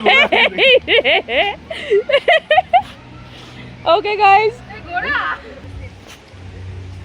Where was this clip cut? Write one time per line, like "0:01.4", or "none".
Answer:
0:05.7